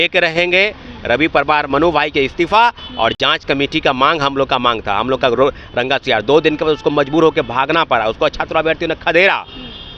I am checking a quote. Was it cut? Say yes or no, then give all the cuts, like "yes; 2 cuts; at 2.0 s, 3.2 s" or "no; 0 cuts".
no; 0 cuts